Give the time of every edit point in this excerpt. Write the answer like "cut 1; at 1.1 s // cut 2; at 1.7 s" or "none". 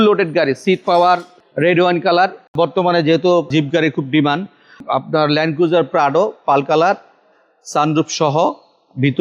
cut 1; at 2.5 s